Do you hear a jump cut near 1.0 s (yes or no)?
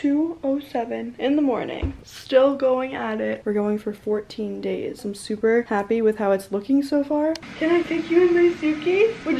no